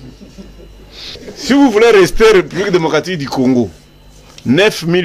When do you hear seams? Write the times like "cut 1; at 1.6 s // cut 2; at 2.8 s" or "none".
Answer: cut 1; at 1.2 s